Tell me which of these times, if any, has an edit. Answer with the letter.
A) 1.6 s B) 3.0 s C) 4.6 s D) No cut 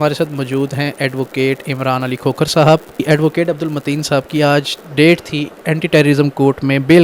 B